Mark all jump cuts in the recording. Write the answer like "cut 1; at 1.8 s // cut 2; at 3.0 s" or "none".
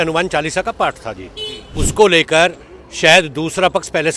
cut 1; at 1.8 s